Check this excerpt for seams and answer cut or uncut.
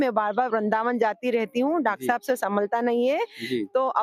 uncut